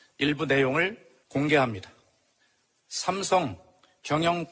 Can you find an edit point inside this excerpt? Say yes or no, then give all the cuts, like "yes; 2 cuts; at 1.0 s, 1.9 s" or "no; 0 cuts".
yes; 1 cut; at 1.4 s